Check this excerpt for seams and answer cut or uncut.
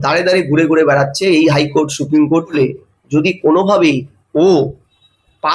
cut